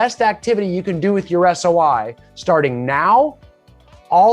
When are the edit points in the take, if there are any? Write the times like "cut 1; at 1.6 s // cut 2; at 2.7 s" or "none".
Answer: none